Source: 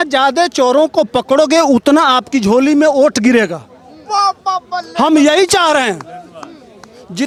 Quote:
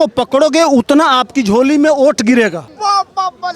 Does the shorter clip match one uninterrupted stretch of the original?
no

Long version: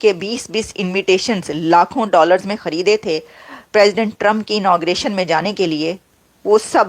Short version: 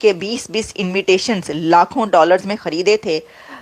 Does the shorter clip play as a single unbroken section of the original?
yes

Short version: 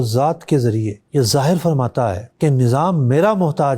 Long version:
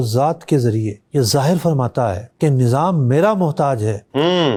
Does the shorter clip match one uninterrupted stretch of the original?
yes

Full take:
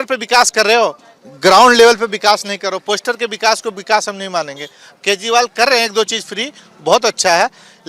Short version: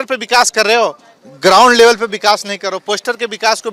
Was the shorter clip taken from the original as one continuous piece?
yes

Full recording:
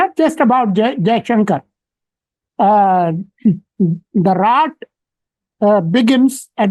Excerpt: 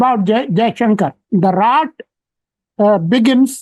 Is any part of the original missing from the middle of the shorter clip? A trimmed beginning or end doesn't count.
yes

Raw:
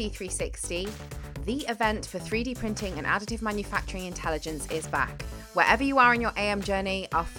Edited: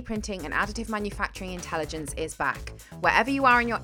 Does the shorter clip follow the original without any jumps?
yes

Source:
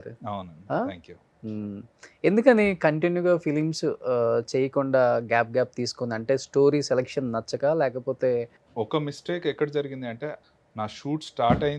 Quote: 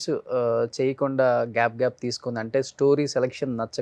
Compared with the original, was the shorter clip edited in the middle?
no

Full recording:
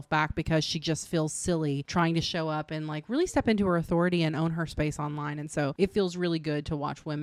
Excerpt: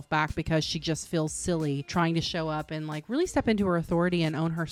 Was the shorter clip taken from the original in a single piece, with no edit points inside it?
yes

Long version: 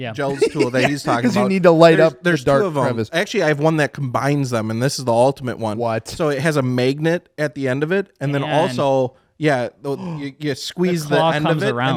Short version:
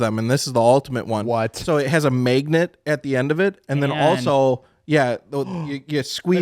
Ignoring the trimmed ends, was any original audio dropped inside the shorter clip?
no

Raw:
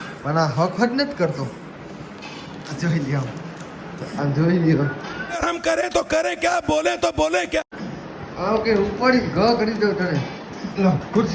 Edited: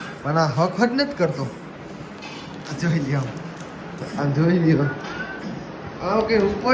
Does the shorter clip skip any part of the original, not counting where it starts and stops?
yes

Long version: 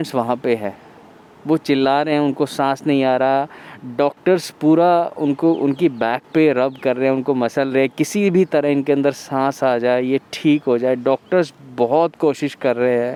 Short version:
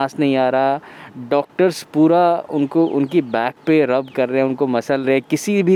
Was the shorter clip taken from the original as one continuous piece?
yes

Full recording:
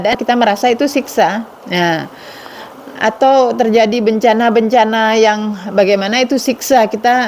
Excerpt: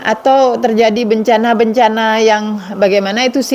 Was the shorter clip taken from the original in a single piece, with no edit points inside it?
yes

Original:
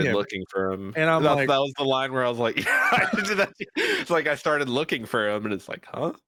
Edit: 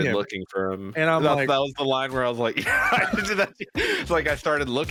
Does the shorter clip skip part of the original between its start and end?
no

